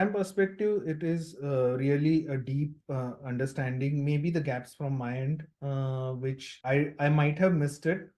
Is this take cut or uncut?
uncut